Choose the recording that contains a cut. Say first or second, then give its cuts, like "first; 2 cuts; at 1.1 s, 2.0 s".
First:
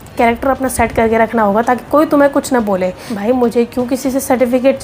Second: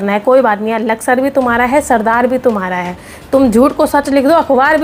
first; 1 cut; at 3.1 s